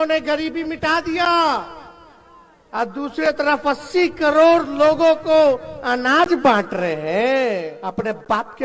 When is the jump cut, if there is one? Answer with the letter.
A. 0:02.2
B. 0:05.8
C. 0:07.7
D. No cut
C